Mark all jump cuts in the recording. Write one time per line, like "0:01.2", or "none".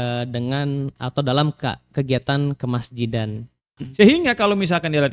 0:03.7